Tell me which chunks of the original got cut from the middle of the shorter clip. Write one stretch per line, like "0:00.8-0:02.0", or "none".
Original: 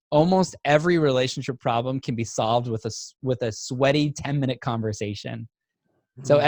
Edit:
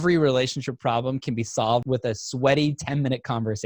0:02.7-0:03.2

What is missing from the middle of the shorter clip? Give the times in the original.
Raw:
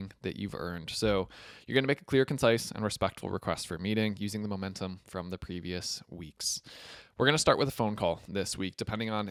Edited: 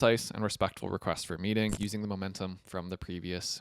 none

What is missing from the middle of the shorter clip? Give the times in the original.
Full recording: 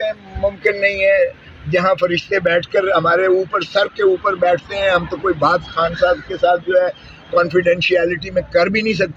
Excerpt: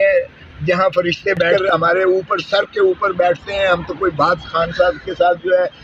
0:02.6-0:02.8

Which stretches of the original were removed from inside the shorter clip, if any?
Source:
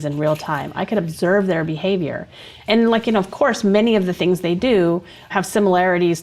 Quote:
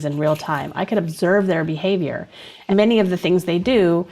0:02.6-0:03.6

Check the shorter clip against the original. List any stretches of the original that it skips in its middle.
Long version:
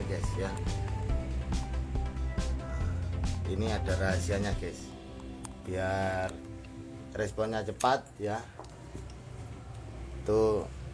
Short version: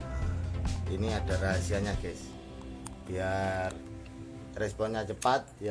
none

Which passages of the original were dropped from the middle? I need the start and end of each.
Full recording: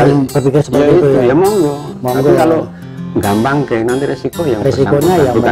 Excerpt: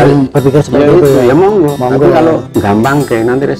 0:01.8-0:02.0
0:02.7-0:03.1

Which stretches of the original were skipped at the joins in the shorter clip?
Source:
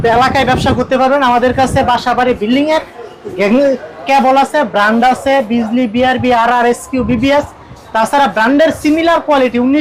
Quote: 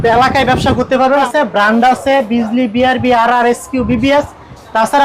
0:01.2-0:04.4

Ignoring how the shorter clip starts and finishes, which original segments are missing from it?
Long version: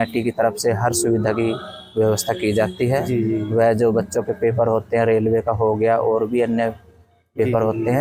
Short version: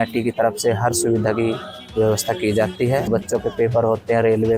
0:03.1-0:03.9

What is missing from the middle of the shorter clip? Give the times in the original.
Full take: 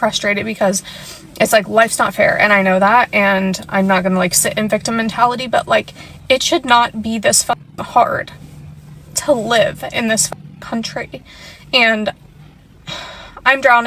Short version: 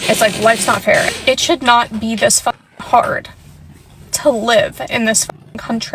0:02.4-0:06.1

